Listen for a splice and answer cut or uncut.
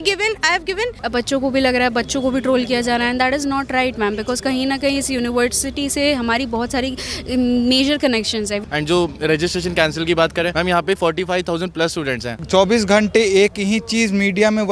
cut